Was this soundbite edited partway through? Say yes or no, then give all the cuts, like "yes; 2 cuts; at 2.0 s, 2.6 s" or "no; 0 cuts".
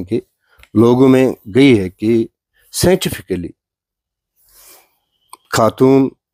no; 0 cuts